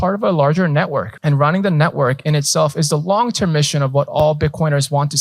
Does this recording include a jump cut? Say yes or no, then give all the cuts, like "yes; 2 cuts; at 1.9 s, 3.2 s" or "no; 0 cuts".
yes; 1 cut; at 1.1 s